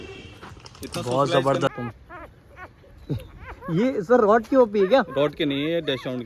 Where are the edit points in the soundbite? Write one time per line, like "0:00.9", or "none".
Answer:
0:01.7